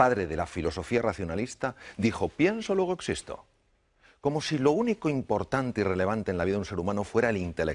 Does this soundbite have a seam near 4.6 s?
yes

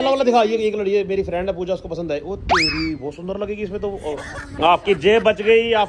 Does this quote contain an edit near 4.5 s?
yes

